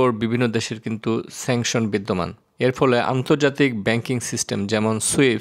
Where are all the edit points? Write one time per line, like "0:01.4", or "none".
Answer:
none